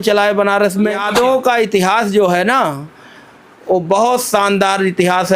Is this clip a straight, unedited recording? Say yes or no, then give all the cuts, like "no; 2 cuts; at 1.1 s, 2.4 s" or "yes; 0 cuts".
no; 1 cut; at 1.0 s